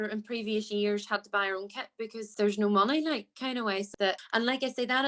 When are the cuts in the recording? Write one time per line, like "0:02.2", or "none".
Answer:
0:02.2
0:04.0